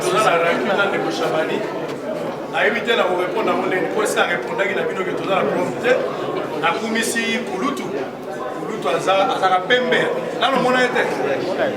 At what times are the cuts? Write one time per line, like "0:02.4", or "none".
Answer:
none